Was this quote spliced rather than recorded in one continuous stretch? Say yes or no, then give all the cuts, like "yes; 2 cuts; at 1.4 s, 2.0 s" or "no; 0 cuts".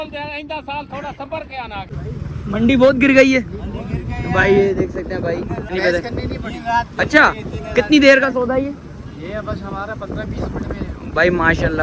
yes; 2 cuts; at 1.9 s, 5.7 s